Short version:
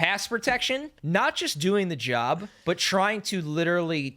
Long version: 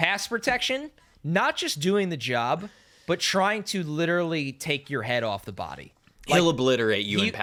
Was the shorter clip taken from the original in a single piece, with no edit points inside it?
no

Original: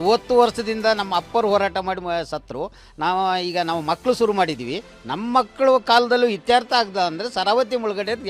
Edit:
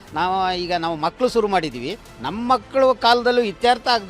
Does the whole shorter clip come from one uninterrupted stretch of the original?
yes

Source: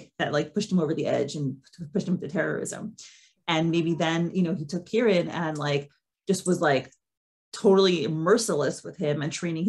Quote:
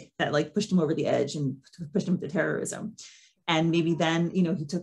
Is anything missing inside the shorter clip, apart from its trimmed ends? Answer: no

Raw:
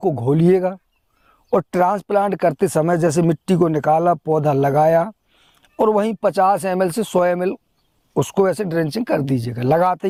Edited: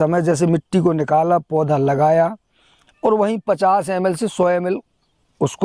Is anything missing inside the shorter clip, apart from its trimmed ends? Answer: no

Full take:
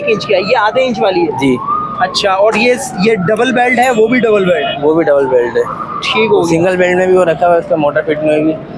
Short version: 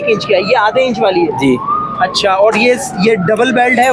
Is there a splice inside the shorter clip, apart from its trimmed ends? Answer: no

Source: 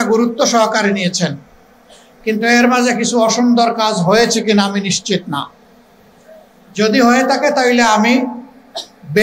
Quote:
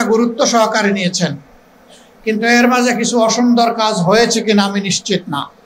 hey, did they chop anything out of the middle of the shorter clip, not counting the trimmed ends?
no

